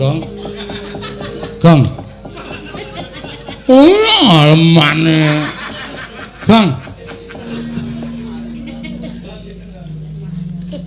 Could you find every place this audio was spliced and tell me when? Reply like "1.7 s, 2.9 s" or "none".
7.4 s